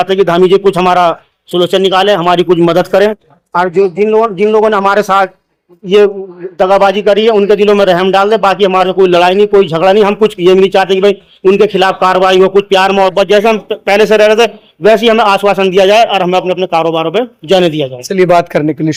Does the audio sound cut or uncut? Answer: uncut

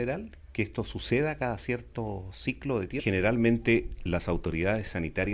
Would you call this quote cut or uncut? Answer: uncut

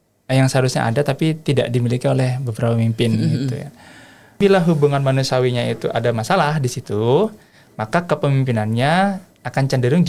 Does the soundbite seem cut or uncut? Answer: cut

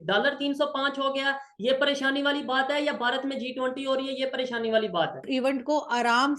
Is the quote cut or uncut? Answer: cut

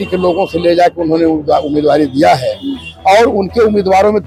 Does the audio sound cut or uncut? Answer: uncut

